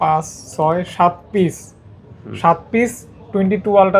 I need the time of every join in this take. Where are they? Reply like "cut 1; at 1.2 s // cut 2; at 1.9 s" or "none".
none